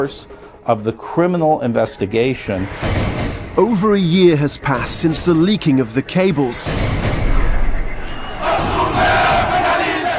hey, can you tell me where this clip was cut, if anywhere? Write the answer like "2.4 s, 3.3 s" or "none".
2.4 s